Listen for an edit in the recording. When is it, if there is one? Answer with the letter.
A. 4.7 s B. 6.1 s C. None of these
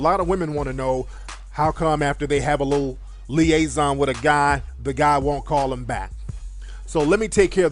A